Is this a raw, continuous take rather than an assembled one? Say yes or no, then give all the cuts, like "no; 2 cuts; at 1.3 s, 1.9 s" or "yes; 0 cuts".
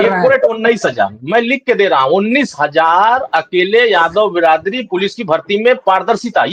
yes; 0 cuts